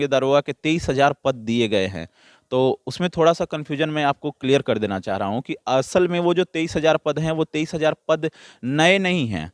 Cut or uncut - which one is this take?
uncut